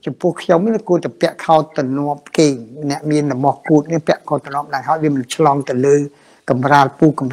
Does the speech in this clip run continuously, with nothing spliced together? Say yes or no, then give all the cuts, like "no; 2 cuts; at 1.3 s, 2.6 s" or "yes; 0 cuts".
yes; 0 cuts